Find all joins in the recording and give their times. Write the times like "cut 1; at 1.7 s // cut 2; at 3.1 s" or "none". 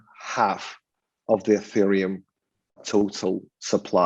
cut 1; at 2.7 s